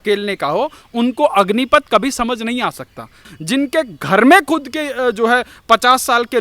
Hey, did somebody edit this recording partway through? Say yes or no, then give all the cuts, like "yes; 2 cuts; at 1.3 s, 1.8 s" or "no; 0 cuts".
yes; 1 cut; at 3.2 s